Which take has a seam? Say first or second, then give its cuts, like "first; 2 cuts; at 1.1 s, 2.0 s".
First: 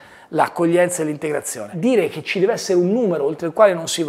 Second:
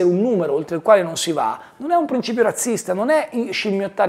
first; 1 cut; at 1.7 s